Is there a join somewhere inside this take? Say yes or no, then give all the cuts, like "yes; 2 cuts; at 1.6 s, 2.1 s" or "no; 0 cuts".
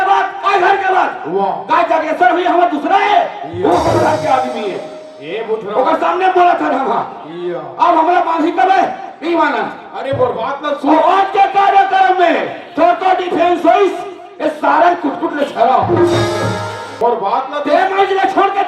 yes; 1 cut; at 17.0 s